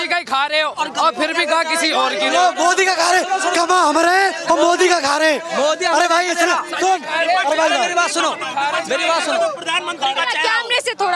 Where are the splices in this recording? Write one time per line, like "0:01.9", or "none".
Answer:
none